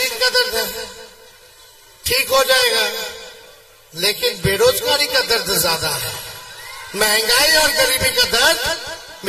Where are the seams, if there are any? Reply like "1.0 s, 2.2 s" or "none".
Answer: none